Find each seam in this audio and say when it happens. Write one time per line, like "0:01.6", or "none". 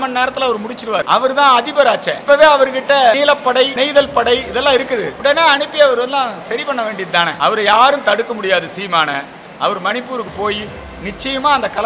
0:01.0
0:02.1
0:03.7
0:05.1
0:07.3